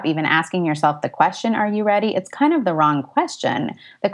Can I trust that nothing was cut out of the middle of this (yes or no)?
yes